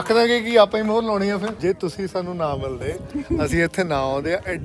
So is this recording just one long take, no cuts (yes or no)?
no